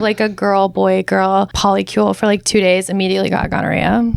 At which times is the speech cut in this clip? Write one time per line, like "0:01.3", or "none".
0:01.5